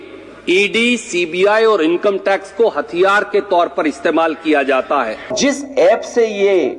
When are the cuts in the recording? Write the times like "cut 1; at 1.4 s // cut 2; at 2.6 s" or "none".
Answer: cut 1; at 5.2 s